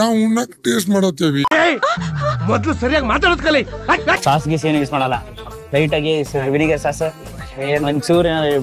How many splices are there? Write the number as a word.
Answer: one